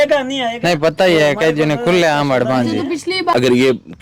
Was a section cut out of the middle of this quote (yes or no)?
yes